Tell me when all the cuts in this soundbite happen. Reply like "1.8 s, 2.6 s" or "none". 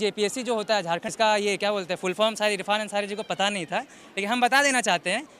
1.1 s